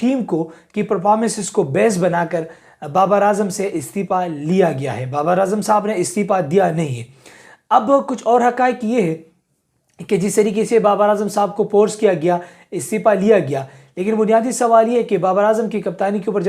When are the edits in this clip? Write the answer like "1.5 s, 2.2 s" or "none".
none